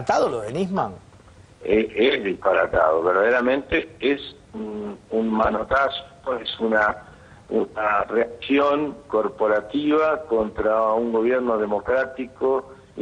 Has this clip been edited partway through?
no; 0 cuts

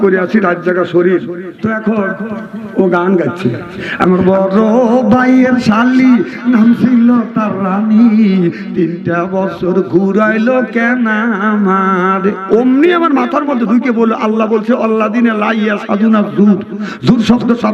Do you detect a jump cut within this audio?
yes; 1 cut; at 1.5 s

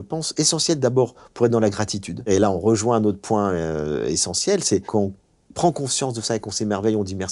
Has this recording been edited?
yes; 2 cuts; at 2.3 s, 4.9 s

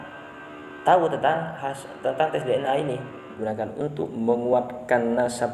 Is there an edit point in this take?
yes; 1 cut; at 3.3 s

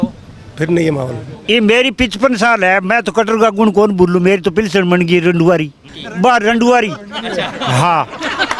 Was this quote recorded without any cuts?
no; 2 cuts; at 1.3 s, 6.0 s

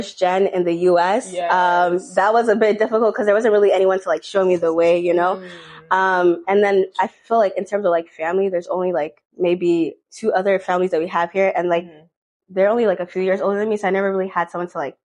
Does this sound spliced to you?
no; 0 cuts

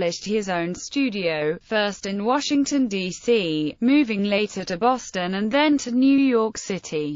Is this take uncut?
no; 1 cut; at 2.9 s

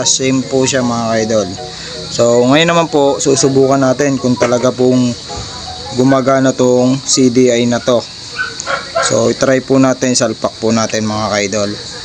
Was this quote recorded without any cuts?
yes; 0 cuts

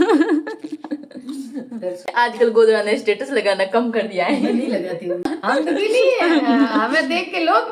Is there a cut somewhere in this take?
yes; 2 cuts; at 2.1 s, 5.2 s

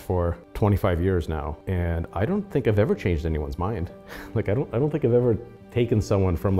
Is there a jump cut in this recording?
no; 0 cuts

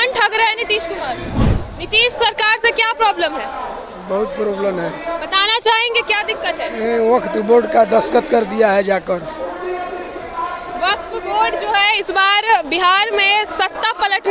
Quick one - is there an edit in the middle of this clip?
yes; 1 cut; at 1.4 s

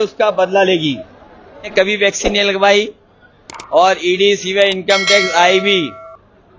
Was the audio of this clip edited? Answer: yes; 1 cut; at 1.7 s

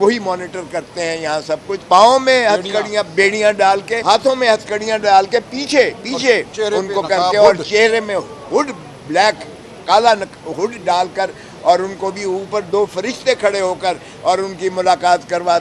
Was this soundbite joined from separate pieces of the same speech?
yes; 2 cuts; at 1.8 s, 3.9 s

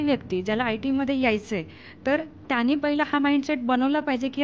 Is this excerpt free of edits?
yes; 0 cuts

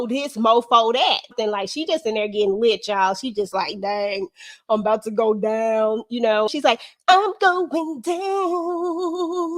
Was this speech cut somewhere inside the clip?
yes; 2 cuts; at 1.3 s, 6.5 s

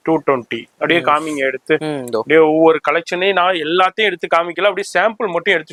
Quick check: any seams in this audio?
no; 0 cuts

